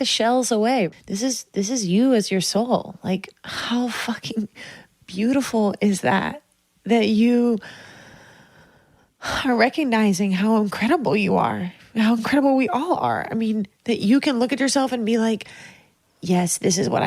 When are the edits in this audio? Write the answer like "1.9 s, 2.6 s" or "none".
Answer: 0.9 s